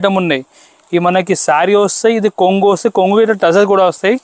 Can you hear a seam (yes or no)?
no